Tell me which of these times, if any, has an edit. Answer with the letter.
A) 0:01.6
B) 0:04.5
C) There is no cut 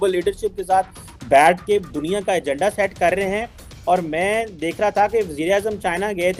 C